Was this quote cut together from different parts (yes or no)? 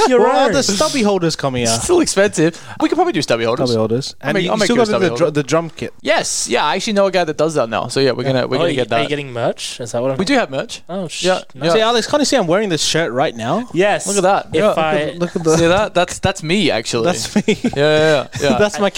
no